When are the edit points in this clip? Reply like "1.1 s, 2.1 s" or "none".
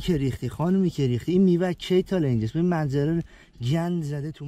none